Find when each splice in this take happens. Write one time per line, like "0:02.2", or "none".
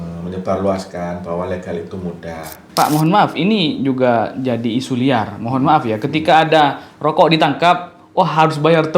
0:02.6